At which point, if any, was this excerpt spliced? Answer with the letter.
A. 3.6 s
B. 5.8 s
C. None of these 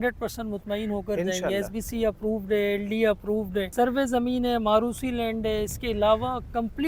C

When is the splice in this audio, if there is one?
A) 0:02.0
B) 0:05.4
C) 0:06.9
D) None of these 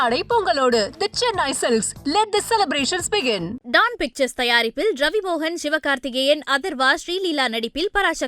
D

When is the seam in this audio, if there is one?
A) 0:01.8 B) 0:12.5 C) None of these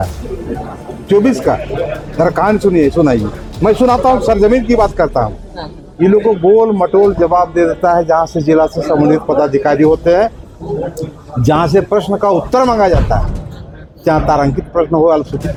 C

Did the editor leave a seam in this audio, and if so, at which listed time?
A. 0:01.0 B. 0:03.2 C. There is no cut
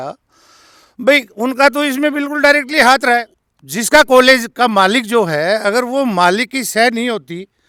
C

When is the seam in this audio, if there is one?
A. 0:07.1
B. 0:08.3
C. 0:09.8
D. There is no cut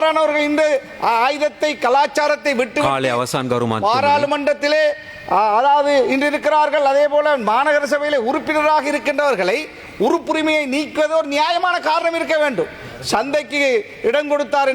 D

